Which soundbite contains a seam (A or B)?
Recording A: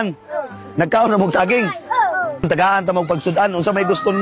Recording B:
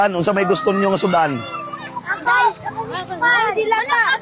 A